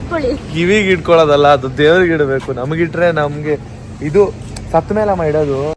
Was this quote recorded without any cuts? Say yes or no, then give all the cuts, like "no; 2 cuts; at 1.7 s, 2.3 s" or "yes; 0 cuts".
yes; 0 cuts